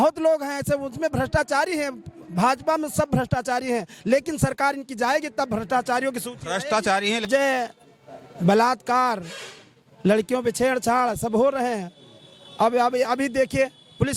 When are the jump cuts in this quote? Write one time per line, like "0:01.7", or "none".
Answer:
0:07.3